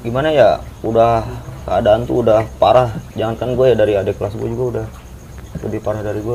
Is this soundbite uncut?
yes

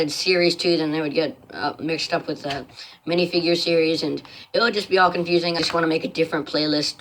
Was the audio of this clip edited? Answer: yes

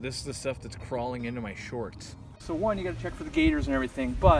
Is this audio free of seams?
no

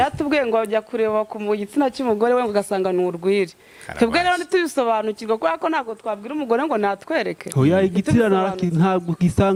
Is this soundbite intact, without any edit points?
yes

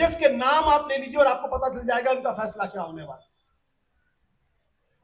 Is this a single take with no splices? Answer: yes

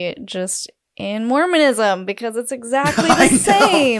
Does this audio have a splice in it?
no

